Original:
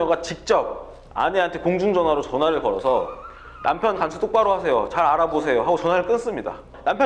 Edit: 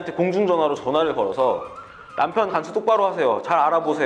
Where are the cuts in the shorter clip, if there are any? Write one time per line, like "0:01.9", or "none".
none